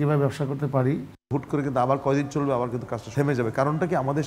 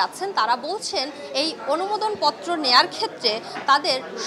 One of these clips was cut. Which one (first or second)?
first